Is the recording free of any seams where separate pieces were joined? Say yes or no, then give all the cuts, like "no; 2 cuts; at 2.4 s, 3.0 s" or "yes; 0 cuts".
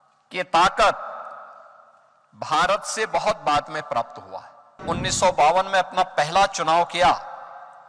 no; 1 cut; at 4.8 s